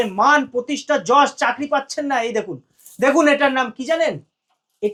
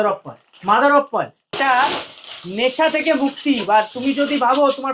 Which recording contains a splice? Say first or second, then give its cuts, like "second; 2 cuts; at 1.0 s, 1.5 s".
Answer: second; 1 cut; at 1.5 s